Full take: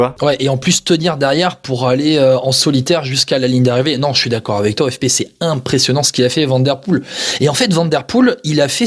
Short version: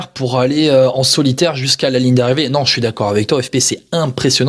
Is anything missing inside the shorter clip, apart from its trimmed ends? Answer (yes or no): no